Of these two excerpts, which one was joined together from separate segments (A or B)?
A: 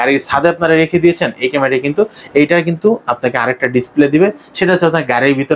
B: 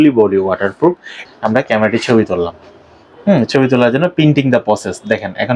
B